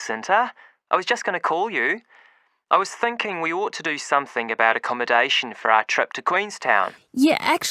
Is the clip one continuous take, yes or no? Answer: no